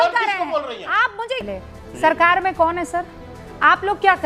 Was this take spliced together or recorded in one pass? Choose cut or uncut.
cut